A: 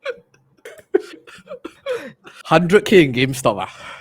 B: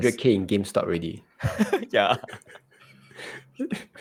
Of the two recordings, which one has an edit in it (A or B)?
A